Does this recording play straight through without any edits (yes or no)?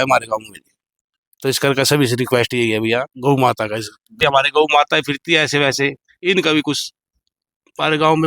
no